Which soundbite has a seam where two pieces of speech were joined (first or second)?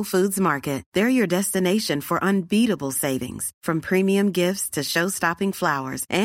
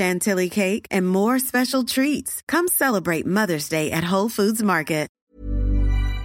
second